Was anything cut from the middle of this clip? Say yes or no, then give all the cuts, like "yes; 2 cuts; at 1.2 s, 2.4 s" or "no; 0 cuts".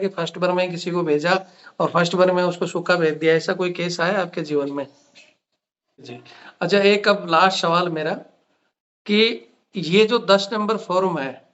yes; 1 cut; at 6.1 s